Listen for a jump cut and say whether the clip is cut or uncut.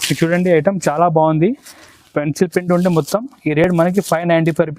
uncut